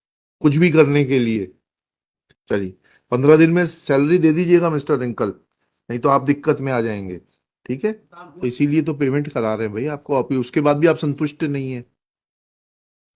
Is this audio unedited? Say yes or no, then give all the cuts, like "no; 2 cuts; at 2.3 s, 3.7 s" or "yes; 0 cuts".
no; 2 cuts; at 2.1 s, 8.1 s